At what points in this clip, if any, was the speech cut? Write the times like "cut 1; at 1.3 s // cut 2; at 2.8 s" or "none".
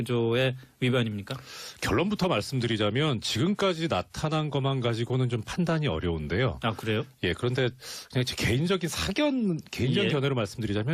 cut 1; at 7.4 s